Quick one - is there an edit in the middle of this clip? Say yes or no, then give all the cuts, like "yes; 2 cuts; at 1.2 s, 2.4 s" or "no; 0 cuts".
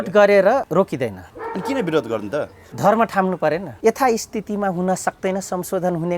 yes; 3 cuts; at 1.0 s, 2.6 s, 3.7 s